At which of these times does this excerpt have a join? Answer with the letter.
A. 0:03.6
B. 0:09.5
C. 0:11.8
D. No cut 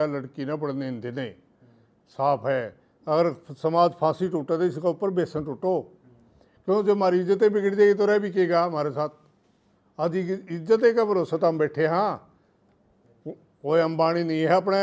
D